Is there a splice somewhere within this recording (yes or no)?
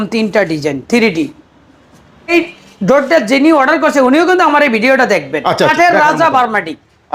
yes